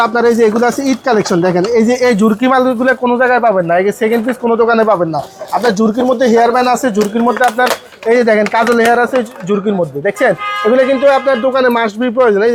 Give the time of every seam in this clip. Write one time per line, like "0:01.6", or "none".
none